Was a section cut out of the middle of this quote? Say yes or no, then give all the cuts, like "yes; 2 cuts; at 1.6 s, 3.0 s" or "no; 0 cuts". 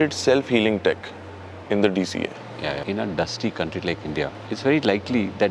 yes; 2 cuts; at 2.8 s, 4.4 s